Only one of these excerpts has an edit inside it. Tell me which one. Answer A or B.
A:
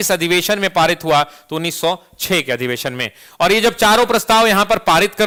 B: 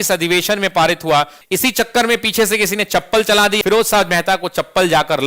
B